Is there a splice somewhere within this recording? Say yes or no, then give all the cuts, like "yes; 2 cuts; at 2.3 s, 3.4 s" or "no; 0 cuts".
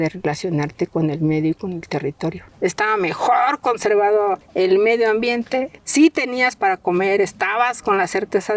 yes; 3 cuts; at 2.5 s, 4.4 s, 5.8 s